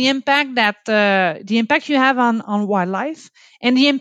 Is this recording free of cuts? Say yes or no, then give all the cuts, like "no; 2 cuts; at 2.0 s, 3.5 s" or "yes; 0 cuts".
yes; 0 cuts